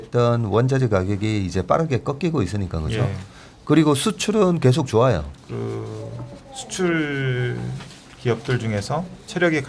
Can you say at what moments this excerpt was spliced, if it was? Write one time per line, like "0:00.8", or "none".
0:05.3